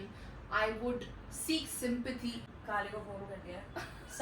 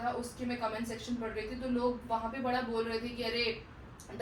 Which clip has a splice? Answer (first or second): first